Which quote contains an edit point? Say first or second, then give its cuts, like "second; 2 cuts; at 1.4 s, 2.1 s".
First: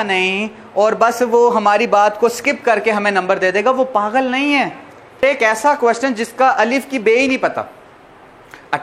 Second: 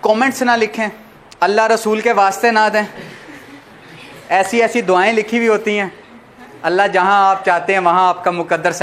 first; 1 cut; at 5.2 s